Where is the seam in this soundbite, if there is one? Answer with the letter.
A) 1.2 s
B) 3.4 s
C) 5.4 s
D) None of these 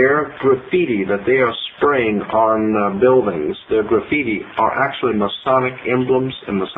A